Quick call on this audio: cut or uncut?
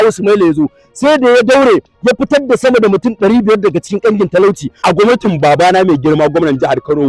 cut